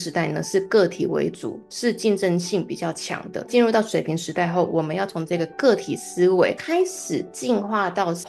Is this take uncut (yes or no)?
yes